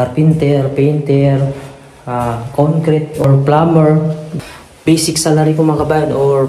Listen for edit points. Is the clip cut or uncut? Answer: cut